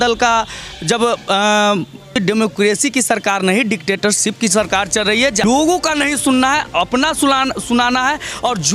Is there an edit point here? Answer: yes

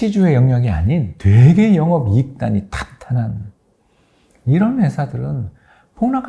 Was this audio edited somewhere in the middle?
yes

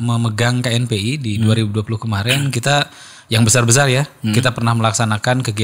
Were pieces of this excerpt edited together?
no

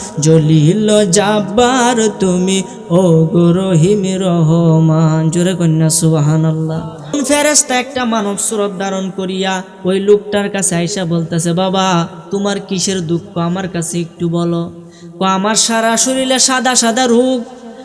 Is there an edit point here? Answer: yes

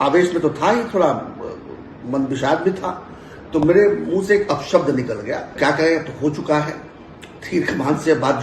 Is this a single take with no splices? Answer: no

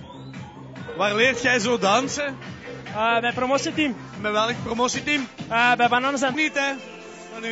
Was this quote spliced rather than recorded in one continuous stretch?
no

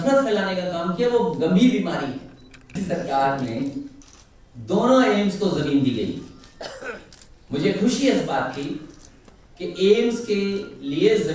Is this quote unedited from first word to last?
no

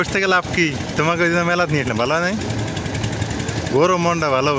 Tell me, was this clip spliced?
no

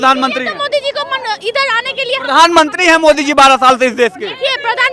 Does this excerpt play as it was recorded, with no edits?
yes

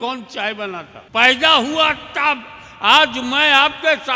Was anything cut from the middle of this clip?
yes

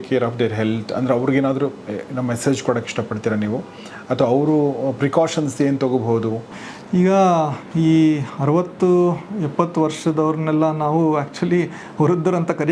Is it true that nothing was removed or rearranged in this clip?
yes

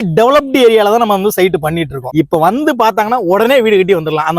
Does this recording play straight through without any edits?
no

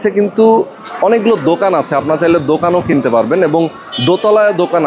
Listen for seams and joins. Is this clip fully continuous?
yes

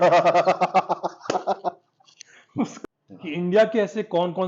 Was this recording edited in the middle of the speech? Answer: yes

